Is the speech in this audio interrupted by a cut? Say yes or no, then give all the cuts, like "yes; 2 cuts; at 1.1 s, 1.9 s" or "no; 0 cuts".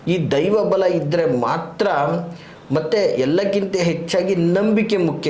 no; 0 cuts